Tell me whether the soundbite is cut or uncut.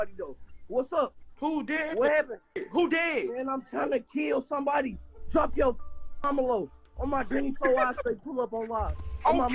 uncut